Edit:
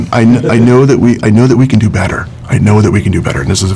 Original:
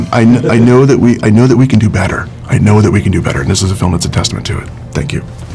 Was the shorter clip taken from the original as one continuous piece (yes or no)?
yes